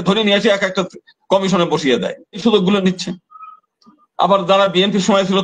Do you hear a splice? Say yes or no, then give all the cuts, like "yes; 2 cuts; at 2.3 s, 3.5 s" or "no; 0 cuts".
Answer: yes; 1 cut; at 2.4 s